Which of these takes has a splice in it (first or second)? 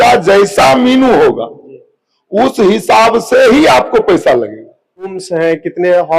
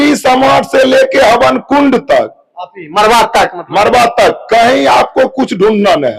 first